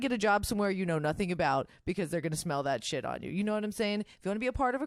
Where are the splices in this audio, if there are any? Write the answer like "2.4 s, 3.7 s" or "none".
none